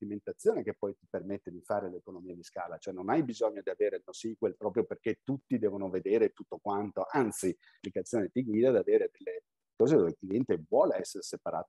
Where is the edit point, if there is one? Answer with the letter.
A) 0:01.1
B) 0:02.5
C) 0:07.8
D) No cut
C